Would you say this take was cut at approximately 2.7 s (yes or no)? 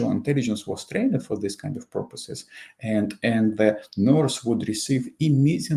no